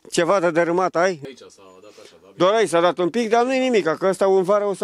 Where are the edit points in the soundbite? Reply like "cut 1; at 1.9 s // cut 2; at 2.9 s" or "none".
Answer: cut 1; at 1.2 s